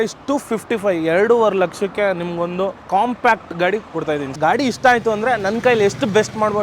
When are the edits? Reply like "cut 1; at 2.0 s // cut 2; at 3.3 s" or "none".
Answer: cut 1; at 2.8 s // cut 2; at 4.3 s